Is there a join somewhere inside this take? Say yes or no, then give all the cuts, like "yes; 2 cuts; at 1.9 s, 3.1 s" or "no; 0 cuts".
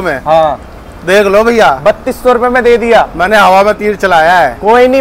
no; 0 cuts